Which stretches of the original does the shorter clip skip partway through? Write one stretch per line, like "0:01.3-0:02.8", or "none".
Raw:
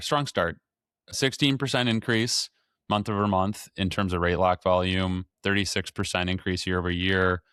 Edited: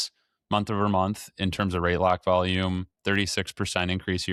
none